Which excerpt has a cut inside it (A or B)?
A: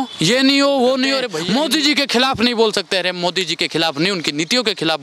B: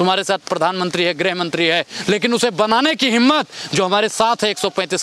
A